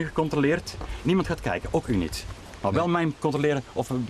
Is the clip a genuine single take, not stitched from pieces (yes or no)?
yes